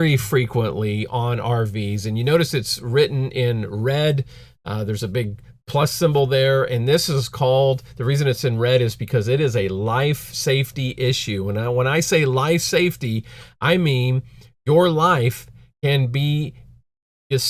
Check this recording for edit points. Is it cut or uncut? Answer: uncut